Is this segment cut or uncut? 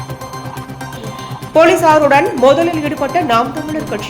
uncut